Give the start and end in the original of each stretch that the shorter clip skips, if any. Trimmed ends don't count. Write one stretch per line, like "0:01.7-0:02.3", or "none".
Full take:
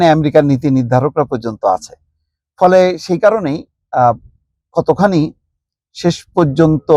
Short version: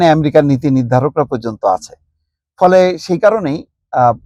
none